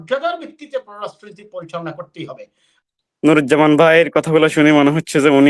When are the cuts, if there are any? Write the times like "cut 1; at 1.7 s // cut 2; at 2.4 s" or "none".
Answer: cut 1; at 2.7 s